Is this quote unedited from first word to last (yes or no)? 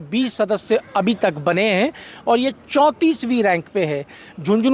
yes